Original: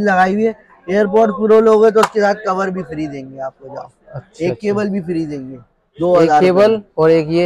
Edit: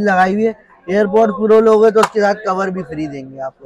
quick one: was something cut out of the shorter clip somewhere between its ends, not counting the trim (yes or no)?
no